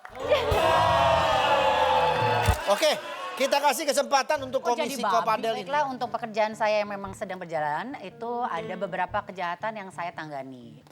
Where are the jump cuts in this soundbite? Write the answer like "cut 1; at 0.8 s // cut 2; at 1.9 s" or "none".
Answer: cut 1; at 2.5 s // cut 2; at 5.6 s

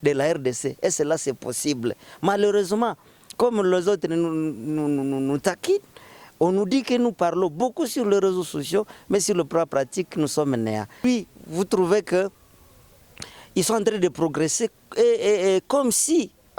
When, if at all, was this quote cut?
cut 1; at 11.0 s

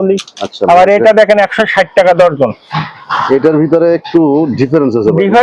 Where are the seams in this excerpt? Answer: none

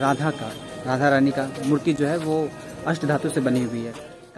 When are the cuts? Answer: none

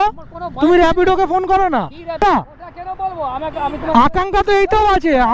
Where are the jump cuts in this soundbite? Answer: cut 1; at 2.2 s

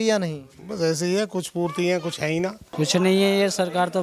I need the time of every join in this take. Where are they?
cut 1; at 2.6 s

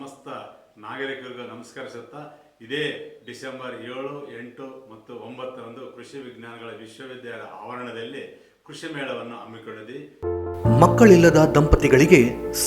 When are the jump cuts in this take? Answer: cut 1; at 10.2 s

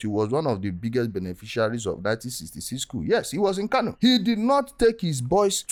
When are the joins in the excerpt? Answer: none

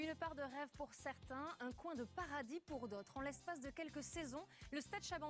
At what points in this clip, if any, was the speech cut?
cut 1; at 2.5 s

